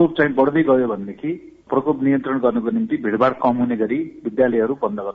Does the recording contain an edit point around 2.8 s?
no; 1 cut; at 1.5 s

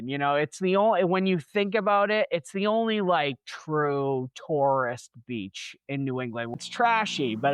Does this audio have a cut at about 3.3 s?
no; 1 cut; at 6.6 s

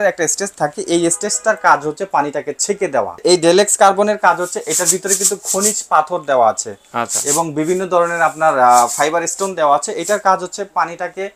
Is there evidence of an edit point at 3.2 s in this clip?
yes; 1 cut; at 3.2 s

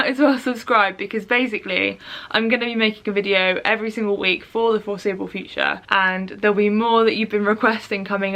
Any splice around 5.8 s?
yes; 1 cut; at 5.8 s

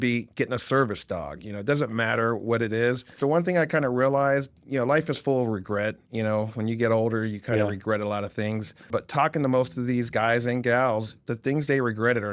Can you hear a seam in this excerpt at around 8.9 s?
yes; 2 cuts; at 3.1 s, 8.9 s

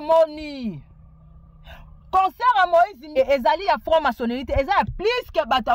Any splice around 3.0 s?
yes; 1 cut; at 3.0 s

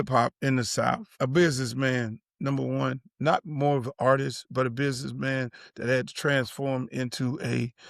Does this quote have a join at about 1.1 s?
yes; 1 cut; at 1.1 s

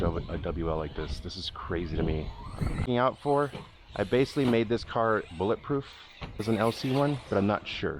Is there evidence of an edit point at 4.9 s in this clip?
no; 2 cuts; at 2.9 s, 6.4 s

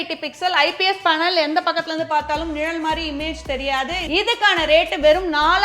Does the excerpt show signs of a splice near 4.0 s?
yes; 1 cut; at 4.0 s

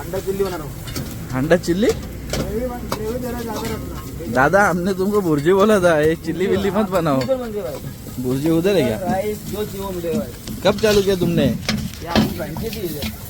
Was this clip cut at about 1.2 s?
no; 0 cuts

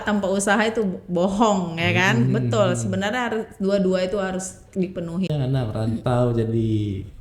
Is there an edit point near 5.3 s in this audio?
yes; 1 cut; at 5.3 s

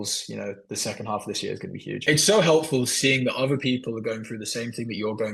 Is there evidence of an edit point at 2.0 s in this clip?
yes; 1 cut; at 2.0 s

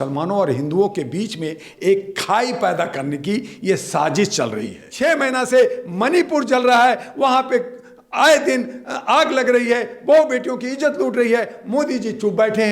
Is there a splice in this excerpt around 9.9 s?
no; 1 cut; at 4.8 s

